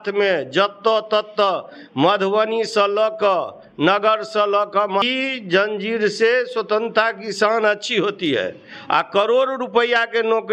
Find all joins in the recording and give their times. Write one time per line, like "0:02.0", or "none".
0:05.0